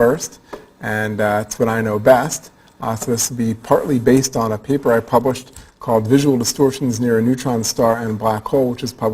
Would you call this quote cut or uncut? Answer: cut